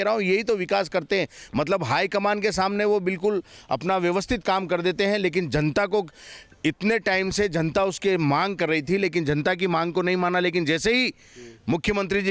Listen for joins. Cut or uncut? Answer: uncut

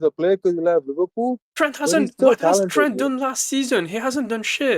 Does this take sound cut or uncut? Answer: uncut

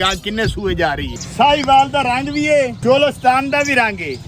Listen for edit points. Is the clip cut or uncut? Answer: cut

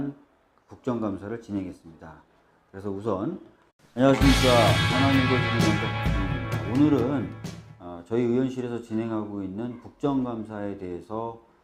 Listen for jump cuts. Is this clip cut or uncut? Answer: uncut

